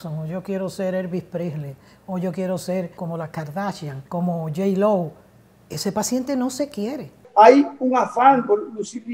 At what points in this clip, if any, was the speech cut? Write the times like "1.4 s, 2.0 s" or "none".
3.0 s, 3.9 s, 7.2 s

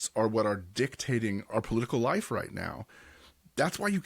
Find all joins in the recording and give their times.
1.5 s

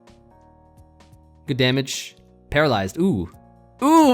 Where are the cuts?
1.5 s

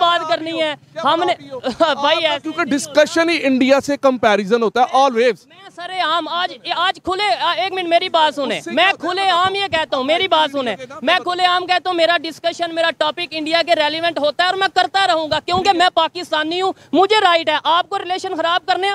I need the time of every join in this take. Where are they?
none

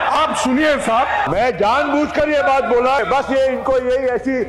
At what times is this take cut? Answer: 1.3 s, 3.0 s

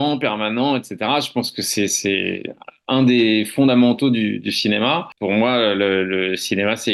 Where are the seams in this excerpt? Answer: 5.1 s

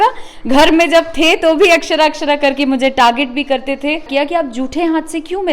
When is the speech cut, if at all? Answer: 4.1 s

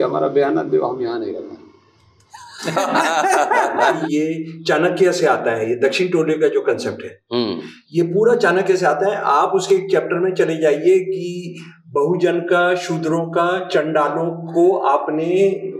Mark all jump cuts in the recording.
4.0 s

